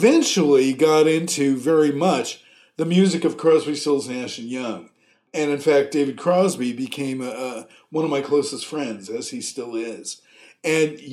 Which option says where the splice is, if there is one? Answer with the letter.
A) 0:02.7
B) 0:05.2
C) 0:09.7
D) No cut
B